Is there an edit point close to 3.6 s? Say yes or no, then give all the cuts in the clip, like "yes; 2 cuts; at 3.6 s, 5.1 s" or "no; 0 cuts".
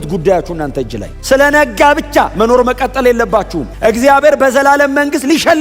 yes; 1 cut; at 3.6 s